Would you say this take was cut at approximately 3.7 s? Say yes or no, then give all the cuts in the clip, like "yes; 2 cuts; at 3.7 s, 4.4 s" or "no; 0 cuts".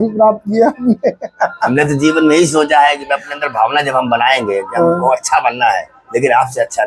no; 0 cuts